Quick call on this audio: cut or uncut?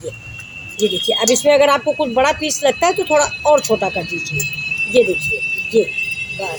uncut